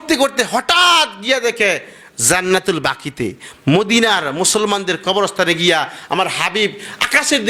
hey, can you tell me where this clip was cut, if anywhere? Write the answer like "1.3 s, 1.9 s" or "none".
none